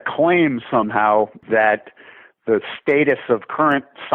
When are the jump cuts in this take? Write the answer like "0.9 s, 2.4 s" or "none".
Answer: 1.4 s